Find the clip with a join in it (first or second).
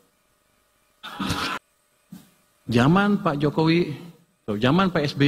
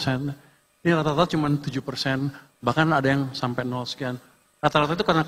first